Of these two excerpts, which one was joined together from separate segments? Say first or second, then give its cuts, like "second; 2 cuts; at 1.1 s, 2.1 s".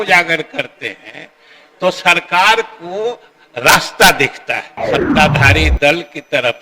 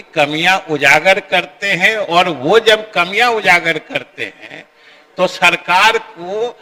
first; 1 cut; at 4.7 s